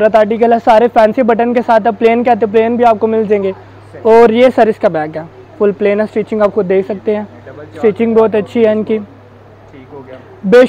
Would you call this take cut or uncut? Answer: uncut